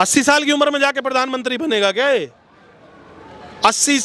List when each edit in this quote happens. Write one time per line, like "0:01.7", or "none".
none